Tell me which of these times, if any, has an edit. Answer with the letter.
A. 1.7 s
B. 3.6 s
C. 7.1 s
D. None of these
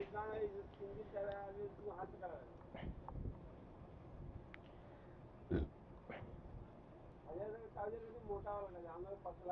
C